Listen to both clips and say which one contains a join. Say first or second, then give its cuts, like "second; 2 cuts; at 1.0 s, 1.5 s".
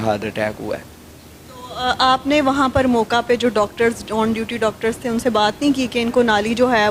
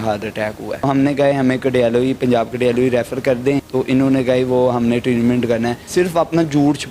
second; 3 cuts; at 0.8 s, 3.7 s, 5.8 s